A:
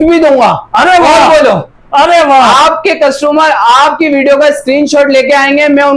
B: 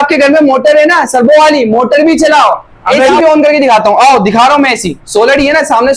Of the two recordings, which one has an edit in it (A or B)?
B